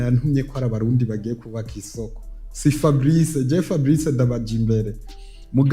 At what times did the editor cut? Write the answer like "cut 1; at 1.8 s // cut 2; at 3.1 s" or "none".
none